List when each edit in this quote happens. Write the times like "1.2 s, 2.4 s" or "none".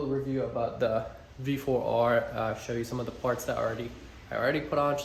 none